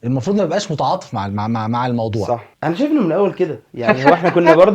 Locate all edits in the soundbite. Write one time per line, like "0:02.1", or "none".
0:02.5